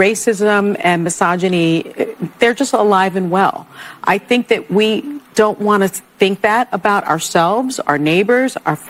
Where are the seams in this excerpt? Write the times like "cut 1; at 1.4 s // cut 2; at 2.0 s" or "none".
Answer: none